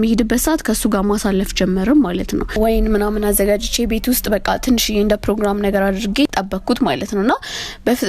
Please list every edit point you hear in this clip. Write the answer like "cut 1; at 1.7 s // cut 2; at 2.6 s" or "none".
cut 1; at 2.6 s // cut 2; at 6.3 s